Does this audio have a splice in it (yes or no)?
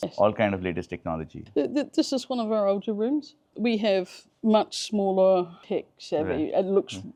no